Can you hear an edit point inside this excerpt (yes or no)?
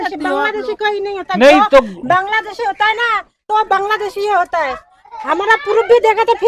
no